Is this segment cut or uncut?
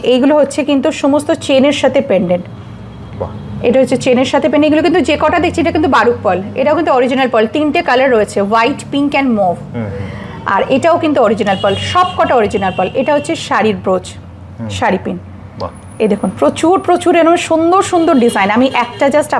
uncut